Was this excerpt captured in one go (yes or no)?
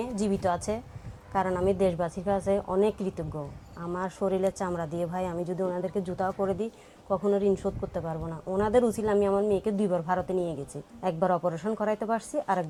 yes